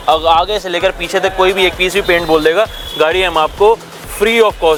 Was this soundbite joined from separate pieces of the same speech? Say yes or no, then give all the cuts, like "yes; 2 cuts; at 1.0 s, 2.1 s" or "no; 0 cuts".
no; 0 cuts